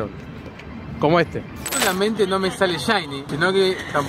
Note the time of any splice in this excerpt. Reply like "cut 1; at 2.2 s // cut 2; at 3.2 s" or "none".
cut 1; at 1.7 s